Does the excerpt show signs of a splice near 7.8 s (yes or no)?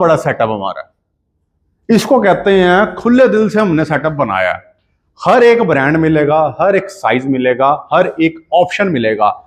no